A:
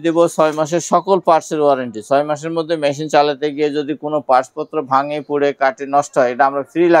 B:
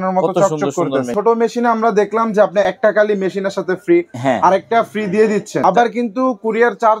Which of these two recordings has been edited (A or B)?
B